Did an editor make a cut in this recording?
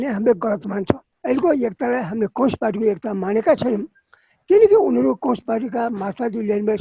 yes; 1 cut; at 1.1 s

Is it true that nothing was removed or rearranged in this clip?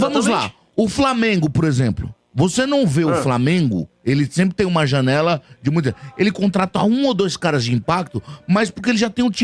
yes; 0 cuts

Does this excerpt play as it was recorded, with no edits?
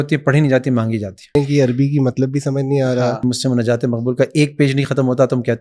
no; 2 cuts; at 1.4 s, 3.2 s

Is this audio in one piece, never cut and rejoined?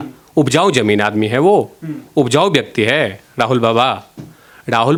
yes; 0 cuts

